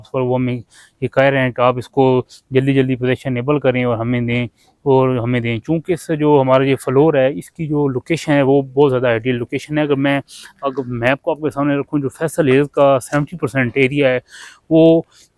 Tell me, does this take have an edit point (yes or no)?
no